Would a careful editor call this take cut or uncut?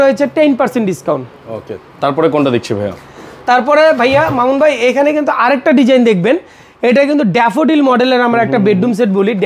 uncut